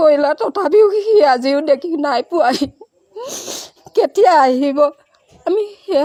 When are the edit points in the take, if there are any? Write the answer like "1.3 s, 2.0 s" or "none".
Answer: none